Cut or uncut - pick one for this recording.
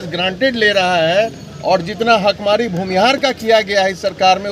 uncut